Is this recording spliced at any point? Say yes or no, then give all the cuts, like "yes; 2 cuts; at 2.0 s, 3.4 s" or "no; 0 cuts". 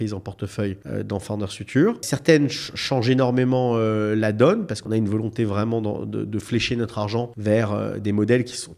yes; 4 cuts; at 0.8 s, 2.1 s, 4.8 s, 7.3 s